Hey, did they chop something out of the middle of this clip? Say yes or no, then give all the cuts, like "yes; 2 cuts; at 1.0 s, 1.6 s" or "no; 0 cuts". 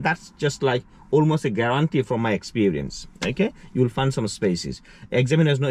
no; 0 cuts